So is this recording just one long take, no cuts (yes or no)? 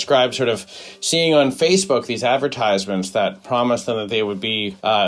yes